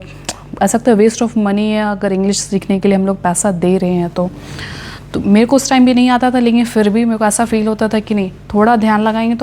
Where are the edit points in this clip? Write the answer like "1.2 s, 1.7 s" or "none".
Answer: none